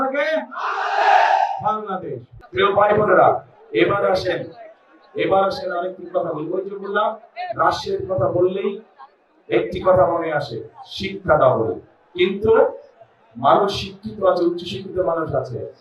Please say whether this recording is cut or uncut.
cut